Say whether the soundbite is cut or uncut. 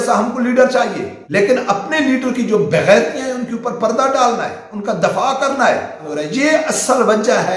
cut